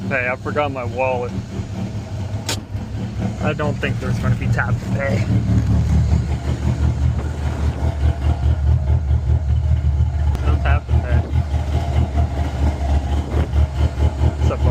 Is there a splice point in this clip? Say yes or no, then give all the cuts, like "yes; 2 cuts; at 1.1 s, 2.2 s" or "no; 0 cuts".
no; 0 cuts